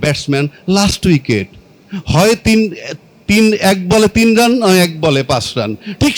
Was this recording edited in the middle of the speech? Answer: no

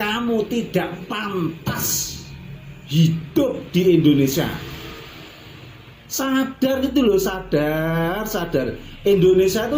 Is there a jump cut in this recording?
no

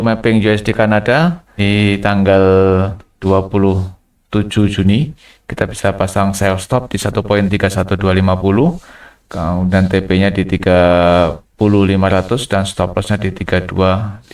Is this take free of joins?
no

